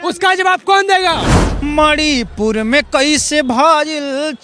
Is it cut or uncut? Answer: cut